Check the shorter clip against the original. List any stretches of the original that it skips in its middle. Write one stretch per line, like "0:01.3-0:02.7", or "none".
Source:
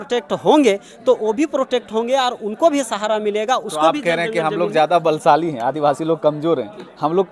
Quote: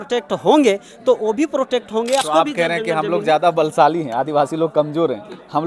0:02.2-0:03.7